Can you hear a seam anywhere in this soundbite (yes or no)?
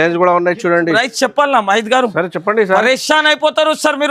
yes